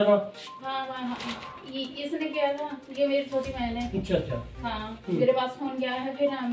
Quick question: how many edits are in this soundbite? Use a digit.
0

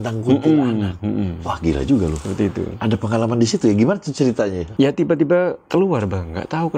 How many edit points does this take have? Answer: 2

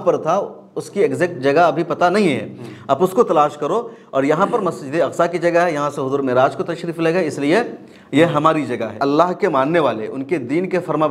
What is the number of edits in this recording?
1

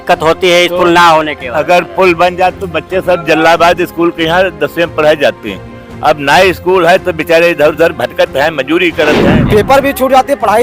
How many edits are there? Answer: 1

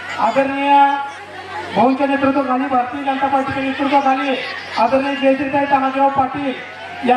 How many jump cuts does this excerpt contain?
0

